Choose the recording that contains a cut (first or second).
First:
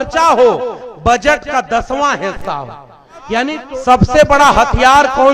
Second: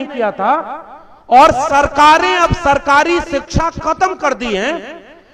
first